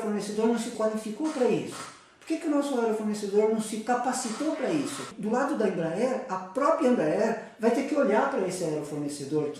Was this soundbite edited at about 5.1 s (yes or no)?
yes